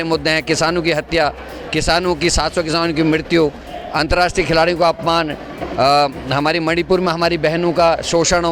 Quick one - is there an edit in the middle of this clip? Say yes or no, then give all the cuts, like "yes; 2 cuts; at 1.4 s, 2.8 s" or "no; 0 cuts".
no; 0 cuts